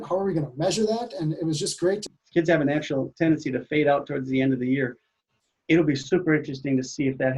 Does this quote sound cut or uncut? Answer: cut